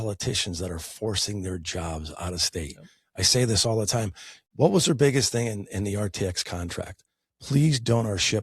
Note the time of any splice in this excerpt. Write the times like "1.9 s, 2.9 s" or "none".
4.4 s